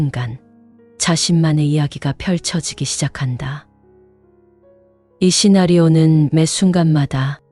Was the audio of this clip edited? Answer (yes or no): no